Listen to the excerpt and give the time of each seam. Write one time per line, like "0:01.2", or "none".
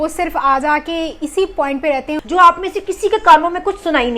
0:02.2